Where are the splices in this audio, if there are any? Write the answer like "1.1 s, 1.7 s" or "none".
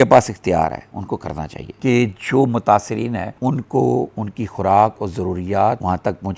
1.6 s